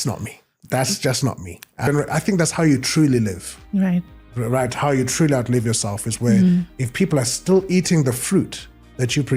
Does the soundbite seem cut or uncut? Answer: cut